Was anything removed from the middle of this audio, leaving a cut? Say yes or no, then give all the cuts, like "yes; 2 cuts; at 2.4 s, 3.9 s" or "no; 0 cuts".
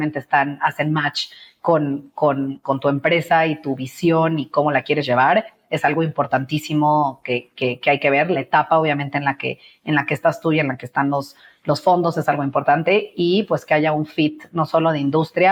no; 0 cuts